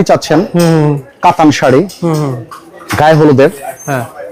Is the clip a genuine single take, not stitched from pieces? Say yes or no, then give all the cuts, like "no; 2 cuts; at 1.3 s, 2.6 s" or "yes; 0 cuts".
yes; 0 cuts